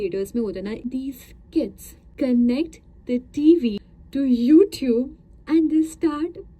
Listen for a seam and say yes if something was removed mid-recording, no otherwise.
yes